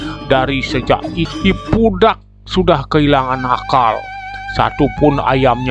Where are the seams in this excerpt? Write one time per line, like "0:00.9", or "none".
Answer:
0:01.2